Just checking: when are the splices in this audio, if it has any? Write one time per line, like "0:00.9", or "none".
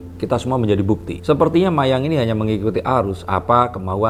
none